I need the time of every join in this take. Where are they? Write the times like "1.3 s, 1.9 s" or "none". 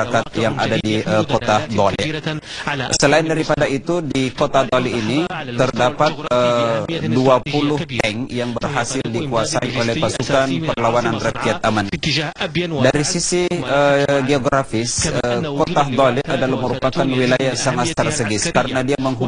none

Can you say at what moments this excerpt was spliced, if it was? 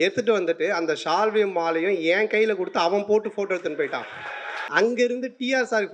4.6 s

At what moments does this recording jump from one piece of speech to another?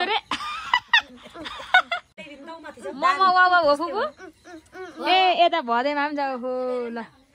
2.2 s

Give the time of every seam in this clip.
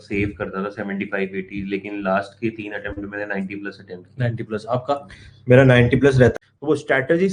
6.3 s

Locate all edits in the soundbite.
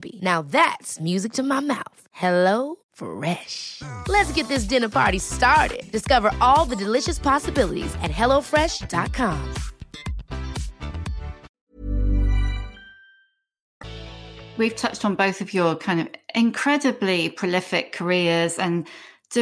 none

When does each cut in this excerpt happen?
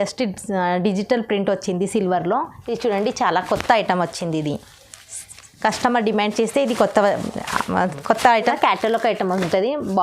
8.5 s

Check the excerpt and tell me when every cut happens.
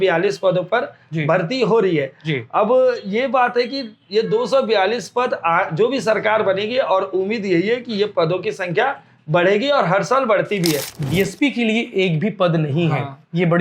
10.9 s

